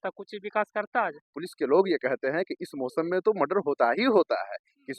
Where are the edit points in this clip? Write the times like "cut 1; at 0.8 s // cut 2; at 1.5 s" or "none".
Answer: cut 1; at 1.4 s